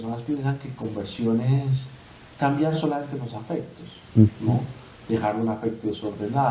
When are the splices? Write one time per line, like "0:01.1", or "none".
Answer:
none

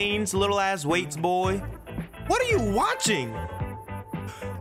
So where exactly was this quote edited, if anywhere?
none

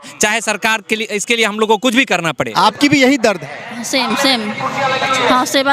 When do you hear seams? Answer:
0:02.5

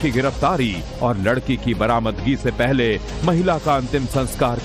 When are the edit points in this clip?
0:01.2

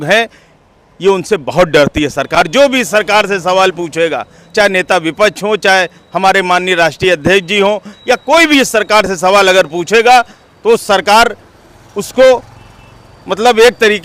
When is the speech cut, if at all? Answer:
none

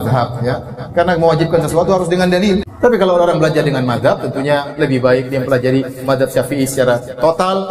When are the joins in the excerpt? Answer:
0:02.7

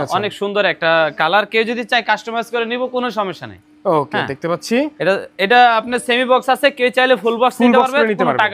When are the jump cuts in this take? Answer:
none

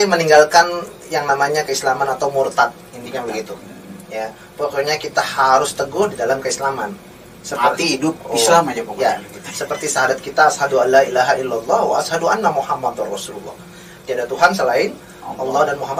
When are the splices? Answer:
none

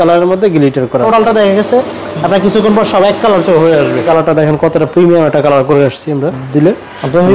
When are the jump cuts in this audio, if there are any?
0:01.0
0:04.0
0:06.4

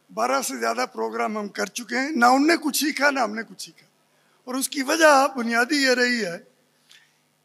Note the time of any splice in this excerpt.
none

